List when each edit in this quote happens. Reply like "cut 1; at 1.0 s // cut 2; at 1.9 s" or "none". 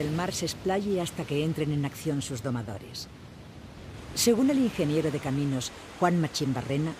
none